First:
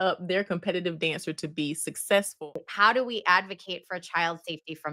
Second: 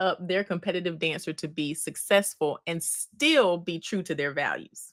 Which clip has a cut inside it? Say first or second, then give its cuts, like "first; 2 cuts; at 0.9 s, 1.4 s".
first; 1 cut; at 2.5 s